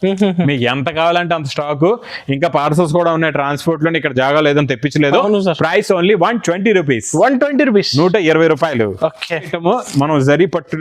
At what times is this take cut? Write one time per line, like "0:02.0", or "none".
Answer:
0:09.5